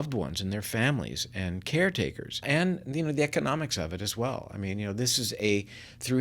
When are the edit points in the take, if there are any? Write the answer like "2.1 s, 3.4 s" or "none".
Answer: 2.4 s